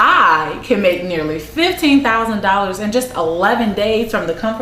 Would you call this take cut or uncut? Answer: uncut